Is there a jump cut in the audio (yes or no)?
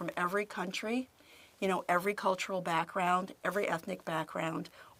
no